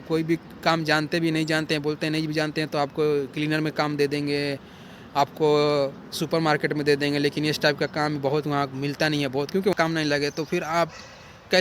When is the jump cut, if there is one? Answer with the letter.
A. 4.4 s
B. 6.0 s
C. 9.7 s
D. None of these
C